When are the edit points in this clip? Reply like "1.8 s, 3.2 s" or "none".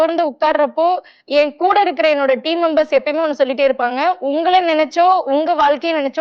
1.1 s